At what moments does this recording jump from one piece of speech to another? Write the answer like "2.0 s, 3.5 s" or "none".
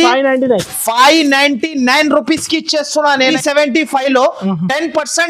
3.3 s